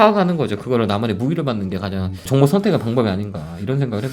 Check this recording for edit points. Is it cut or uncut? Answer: cut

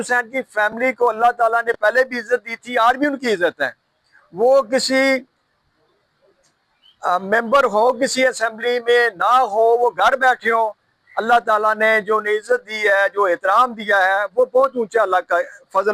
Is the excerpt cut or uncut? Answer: uncut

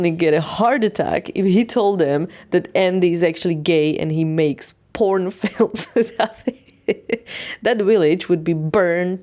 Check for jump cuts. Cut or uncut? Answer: uncut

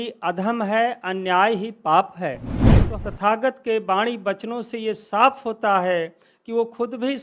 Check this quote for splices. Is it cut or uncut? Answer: cut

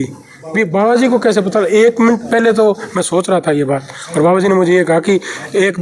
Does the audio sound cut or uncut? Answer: uncut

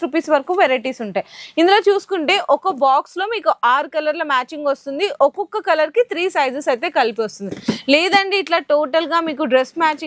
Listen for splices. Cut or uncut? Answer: uncut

